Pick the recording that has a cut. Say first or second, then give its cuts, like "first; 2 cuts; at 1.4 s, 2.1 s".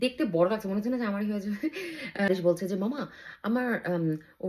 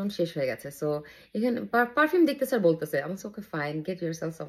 first; 1 cut; at 2.3 s